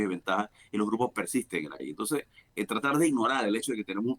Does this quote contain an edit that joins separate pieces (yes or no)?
yes